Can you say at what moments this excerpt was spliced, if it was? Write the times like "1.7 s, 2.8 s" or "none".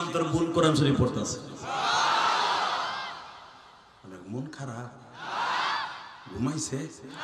none